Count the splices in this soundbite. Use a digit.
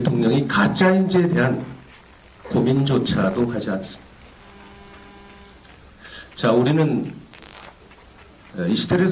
0